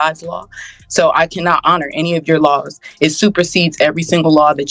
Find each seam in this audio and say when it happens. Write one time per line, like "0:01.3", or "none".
none